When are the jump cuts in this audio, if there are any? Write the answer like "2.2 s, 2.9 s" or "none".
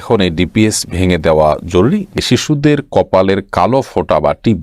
2.2 s